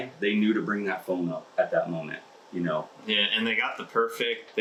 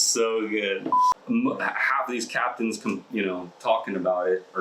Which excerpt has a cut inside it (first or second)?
second